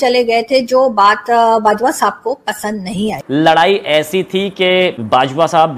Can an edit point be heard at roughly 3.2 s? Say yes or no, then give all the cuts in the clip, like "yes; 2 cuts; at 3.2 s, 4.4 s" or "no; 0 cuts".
yes; 1 cut; at 3.2 s